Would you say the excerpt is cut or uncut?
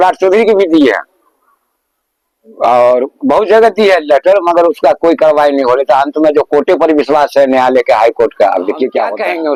uncut